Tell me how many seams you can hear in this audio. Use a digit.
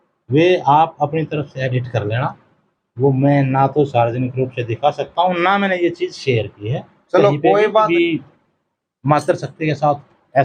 1